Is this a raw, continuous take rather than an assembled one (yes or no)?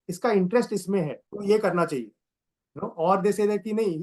no